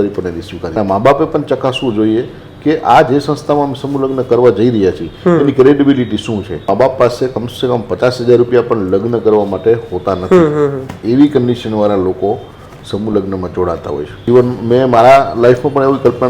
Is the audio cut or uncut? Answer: cut